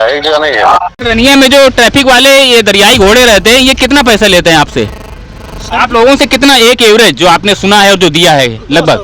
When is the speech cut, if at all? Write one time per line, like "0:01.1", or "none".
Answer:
0:01.3

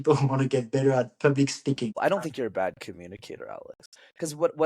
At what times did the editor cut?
0:02.0

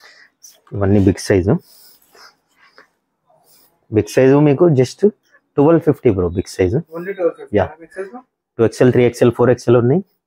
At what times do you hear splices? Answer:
none

